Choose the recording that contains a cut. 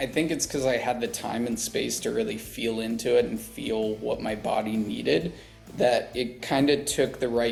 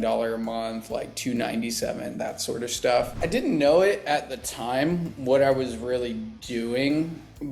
second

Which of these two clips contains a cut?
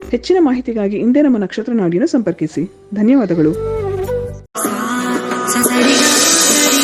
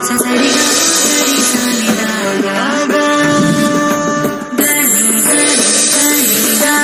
first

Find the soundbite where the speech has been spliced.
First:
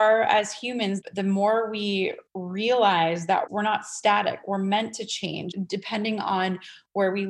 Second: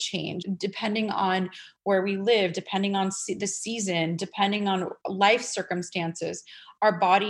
first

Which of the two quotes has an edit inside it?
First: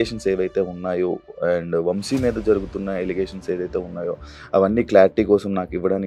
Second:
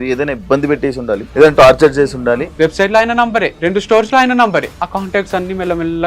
second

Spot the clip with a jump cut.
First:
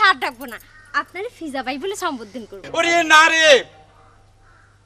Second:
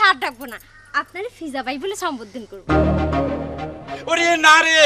first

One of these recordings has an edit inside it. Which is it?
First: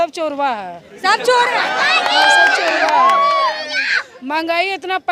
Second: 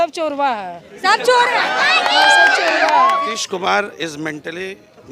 second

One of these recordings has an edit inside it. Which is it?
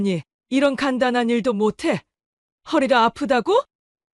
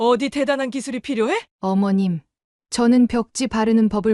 second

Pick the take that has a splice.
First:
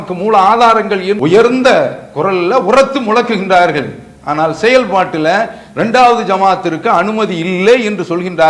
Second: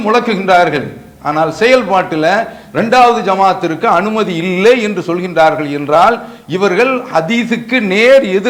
first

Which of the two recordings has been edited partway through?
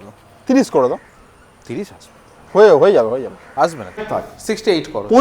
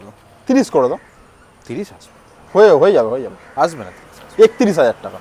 first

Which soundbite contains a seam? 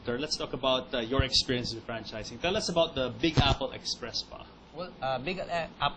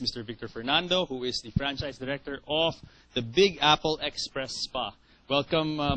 first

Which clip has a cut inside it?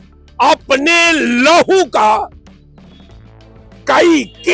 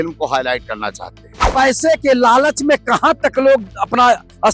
second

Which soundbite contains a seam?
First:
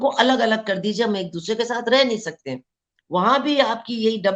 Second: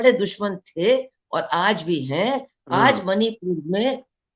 second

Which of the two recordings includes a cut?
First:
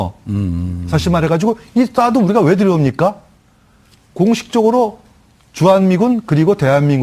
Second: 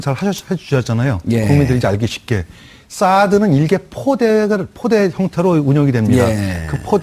second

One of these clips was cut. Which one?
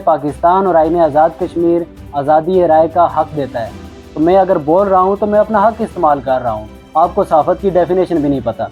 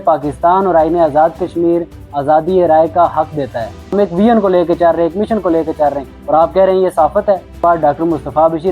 second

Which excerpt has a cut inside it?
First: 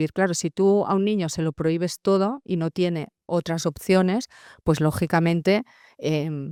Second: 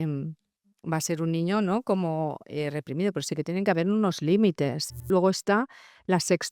second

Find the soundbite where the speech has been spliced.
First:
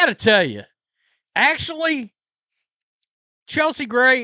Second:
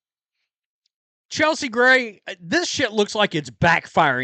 second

